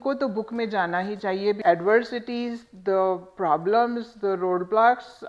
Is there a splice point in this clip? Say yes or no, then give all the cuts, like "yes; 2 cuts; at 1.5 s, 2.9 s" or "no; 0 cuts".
yes; 1 cut; at 1.6 s